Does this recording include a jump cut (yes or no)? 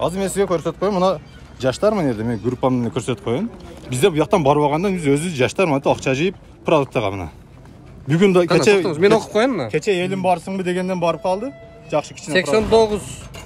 no